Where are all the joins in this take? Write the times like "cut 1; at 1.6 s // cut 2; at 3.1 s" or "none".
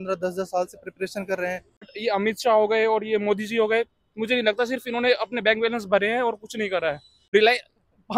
cut 1; at 1.9 s // cut 2; at 7.1 s